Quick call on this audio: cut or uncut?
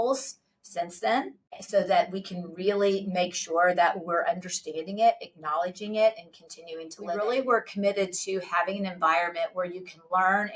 cut